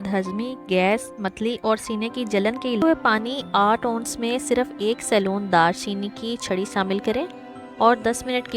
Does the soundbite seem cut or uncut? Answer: cut